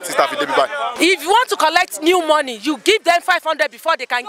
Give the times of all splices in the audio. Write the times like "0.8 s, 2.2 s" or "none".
1.0 s